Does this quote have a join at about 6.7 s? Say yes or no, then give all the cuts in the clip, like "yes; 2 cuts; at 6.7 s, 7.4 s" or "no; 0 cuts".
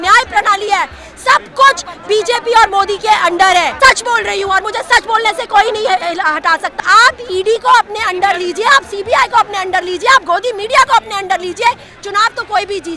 yes; 2 cuts; at 3.7 s, 6.7 s